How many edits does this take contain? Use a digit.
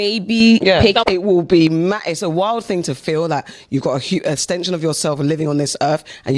1